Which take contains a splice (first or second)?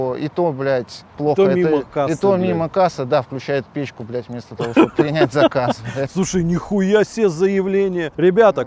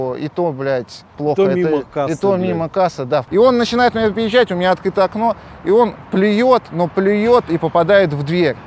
second